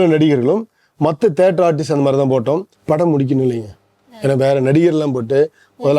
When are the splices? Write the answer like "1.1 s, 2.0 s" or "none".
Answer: 2.7 s